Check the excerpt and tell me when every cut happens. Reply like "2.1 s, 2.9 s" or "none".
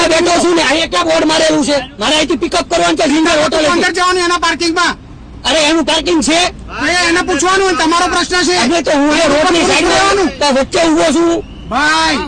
1.9 s